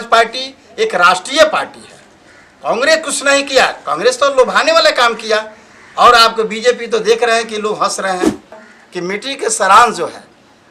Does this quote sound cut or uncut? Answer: cut